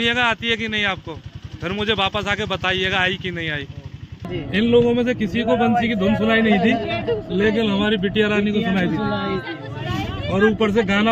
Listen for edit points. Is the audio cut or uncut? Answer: cut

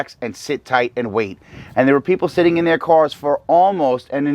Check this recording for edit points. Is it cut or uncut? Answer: uncut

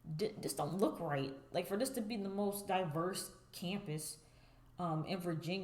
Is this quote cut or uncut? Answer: uncut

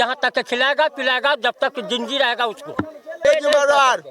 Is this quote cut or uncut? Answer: cut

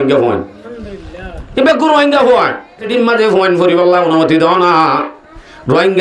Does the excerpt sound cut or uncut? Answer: cut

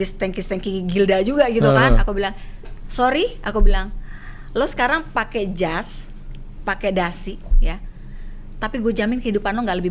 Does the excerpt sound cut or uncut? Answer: uncut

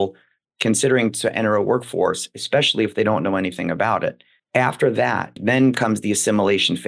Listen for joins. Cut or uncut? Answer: cut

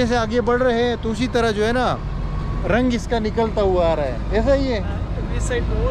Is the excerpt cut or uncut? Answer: uncut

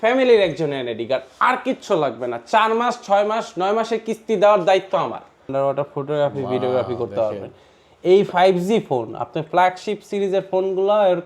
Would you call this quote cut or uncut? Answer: cut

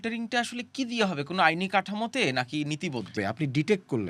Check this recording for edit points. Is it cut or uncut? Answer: cut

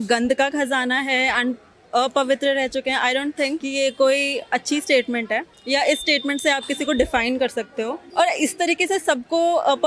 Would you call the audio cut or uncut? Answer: cut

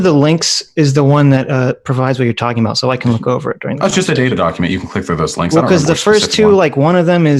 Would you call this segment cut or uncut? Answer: uncut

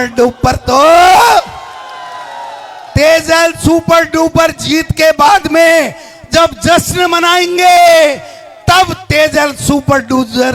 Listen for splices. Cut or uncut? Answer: uncut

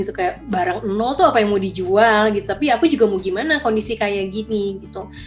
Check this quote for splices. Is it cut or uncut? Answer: uncut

